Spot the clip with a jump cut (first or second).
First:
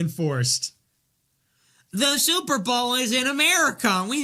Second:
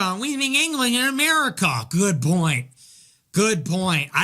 second